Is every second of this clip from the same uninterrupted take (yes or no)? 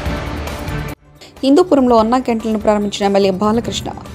yes